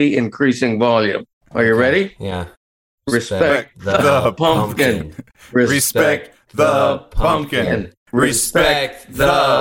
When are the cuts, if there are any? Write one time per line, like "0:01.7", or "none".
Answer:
none